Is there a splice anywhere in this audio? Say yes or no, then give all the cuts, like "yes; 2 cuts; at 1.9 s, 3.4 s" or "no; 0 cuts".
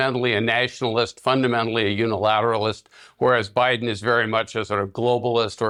no; 0 cuts